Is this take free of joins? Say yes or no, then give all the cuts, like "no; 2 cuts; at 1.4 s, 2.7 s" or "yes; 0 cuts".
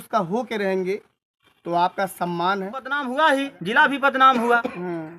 no; 1 cut; at 3.0 s